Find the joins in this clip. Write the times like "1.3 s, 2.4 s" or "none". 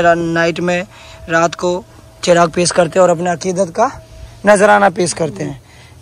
none